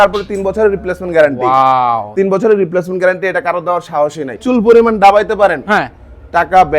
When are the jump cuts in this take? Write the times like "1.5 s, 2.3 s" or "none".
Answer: 4.4 s